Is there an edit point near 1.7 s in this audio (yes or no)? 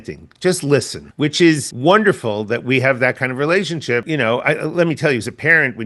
yes